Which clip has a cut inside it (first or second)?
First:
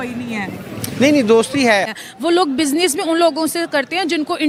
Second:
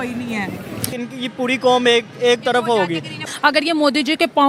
second